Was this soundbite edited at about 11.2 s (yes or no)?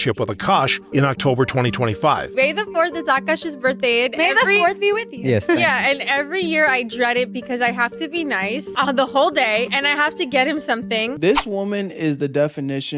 yes